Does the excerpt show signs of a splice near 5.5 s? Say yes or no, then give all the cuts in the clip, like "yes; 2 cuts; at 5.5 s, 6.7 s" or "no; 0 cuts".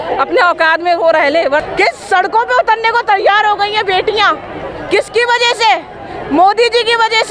no; 1 cut; at 1.6 s